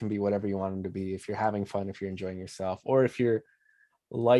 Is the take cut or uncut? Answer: uncut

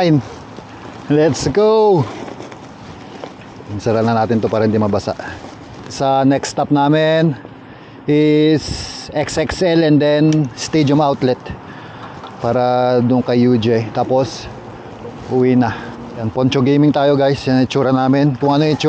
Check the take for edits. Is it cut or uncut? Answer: cut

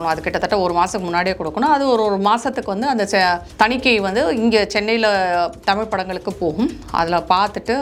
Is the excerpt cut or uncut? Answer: uncut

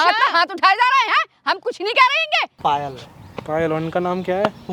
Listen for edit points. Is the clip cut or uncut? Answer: cut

